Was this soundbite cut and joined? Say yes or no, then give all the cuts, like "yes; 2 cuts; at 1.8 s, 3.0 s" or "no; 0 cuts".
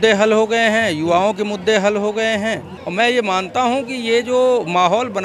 yes; 1 cut; at 2.8 s